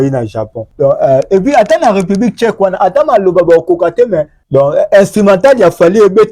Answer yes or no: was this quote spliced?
no